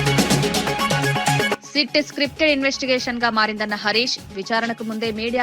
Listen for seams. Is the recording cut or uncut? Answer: cut